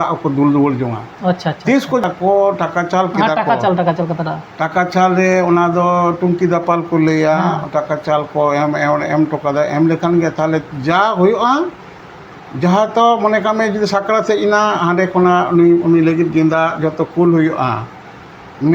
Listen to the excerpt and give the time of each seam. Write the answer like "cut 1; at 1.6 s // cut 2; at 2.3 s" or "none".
cut 1; at 2.0 s